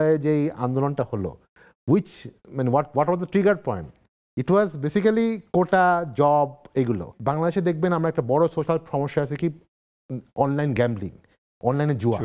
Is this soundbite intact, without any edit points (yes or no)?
no